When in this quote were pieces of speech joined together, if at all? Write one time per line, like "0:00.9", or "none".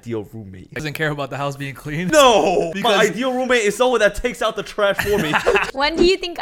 0:00.8
0:02.1
0:02.7
0:05.6